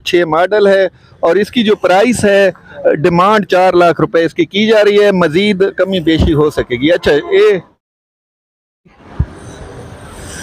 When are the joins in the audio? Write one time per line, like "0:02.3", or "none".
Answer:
none